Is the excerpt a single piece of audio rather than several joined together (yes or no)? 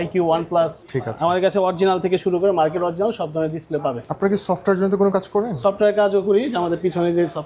yes